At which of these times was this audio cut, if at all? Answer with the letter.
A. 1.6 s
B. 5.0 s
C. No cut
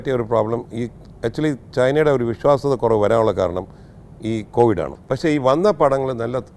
B